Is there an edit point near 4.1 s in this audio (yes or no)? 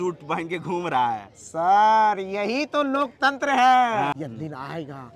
yes